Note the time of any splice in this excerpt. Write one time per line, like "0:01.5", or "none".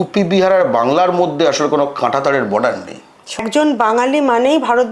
0:03.4

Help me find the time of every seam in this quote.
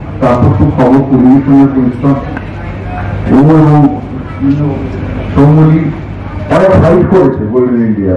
0:06.4

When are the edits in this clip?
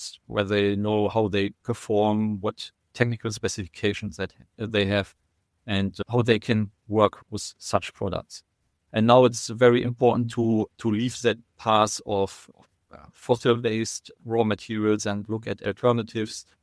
none

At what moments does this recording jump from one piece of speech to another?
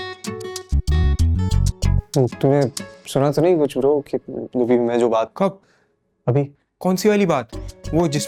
none

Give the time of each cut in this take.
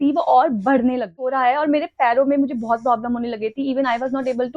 0:01.3

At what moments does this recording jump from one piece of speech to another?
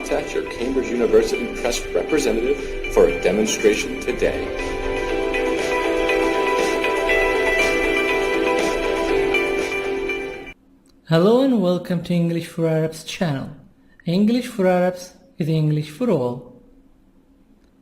0:01.1

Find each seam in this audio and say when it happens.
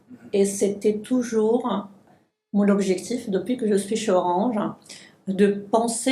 0:02.0

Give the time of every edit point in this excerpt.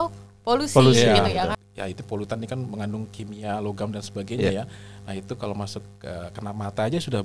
0:01.6

